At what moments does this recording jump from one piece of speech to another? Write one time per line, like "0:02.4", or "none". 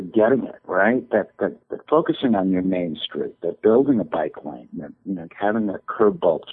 0:01.7